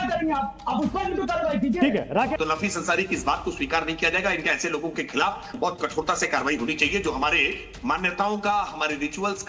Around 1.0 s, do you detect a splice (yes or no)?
no